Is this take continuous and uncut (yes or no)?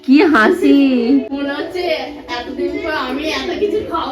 no